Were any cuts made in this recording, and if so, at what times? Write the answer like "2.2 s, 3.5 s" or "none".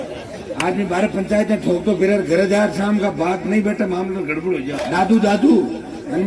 4.7 s